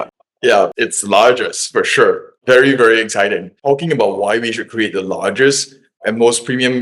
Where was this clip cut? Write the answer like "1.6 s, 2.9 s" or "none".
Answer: 3.5 s